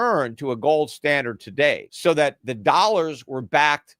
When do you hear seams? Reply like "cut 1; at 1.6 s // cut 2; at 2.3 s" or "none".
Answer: cut 1; at 1.9 s

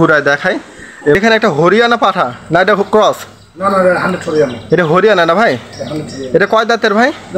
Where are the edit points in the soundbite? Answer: cut 1; at 1.2 s

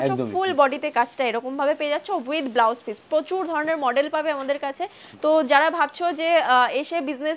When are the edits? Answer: none

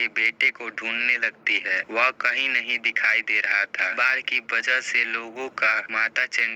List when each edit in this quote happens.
cut 1; at 3.9 s

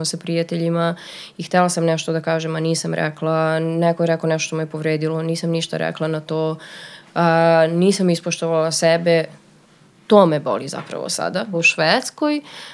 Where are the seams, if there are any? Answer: cut 1; at 11.5 s

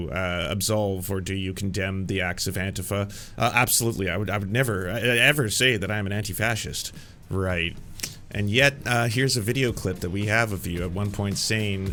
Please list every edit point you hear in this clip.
none

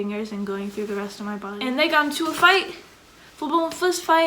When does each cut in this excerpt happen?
cut 1; at 1.5 s

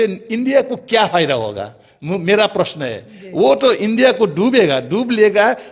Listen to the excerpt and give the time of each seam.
none

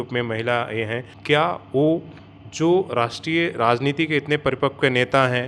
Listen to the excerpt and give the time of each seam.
cut 1; at 1.1 s

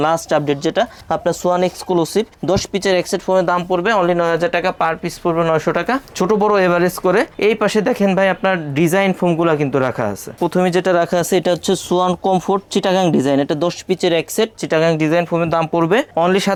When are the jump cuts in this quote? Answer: none

